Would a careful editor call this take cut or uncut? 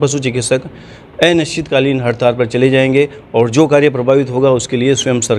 uncut